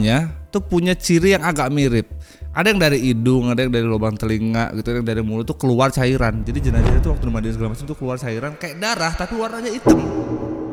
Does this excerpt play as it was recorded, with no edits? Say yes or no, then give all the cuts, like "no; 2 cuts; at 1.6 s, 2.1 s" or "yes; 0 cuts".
yes; 0 cuts